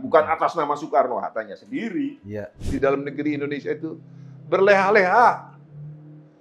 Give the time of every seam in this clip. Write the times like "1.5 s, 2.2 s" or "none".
2.6 s